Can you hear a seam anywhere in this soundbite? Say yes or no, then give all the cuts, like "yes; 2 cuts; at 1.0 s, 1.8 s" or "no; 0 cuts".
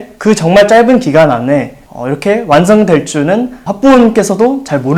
no; 0 cuts